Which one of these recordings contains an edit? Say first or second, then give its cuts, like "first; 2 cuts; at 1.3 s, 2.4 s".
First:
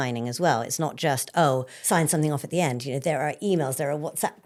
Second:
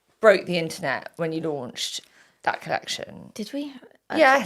second; 1 cut; at 3.2 s